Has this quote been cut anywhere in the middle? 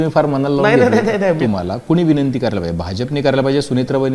yes; 1 cut; at 1.4 s

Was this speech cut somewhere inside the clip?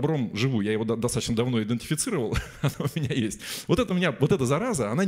no; 0 cuts

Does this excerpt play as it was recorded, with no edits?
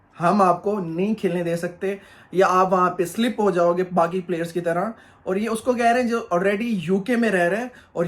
yes; 0 cuts

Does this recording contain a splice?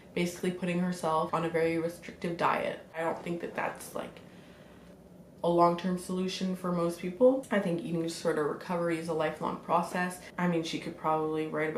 yes; 5 cuts; at 1.3 s, 3.0 s, 4.9 s, 7.4 s, 10.2 s

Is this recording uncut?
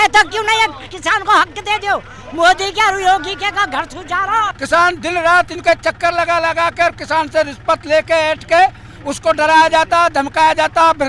no; 1 cut; at 4.6 s

